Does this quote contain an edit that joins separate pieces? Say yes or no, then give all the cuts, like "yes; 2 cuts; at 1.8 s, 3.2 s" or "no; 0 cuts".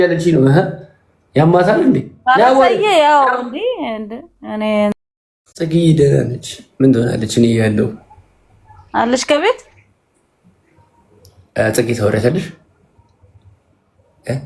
yes; 1 cut; at 4.9 s